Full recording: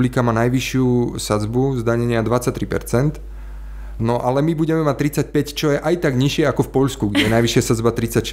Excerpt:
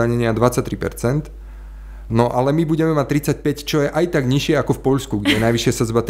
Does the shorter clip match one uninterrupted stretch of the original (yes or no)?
yes